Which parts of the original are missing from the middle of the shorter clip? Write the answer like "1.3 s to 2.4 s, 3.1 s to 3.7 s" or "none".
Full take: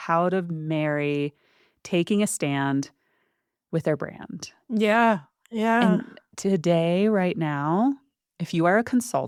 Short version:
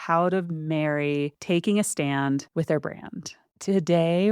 1.4 s to 1.8 s, 2.9 s to 3.6 s, 4.6 s to 6.2 s